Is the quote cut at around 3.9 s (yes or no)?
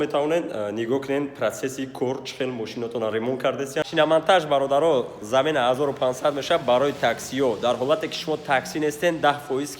yes